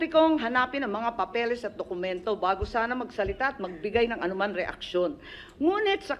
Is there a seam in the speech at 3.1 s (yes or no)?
no